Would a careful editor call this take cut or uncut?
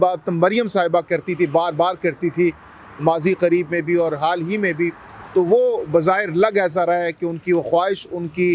uncut